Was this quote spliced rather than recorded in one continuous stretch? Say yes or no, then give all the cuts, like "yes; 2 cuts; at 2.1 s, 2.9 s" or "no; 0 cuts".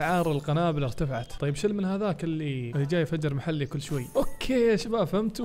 yes; 3 cuts; at 1.3 s, 2.7 s, 4.0 s